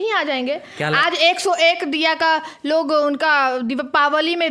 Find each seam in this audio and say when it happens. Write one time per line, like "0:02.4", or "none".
none